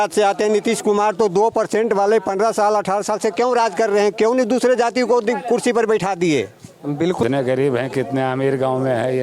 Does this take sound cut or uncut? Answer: cut